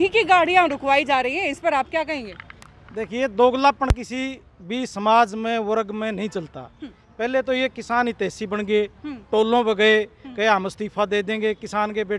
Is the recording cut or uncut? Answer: uncut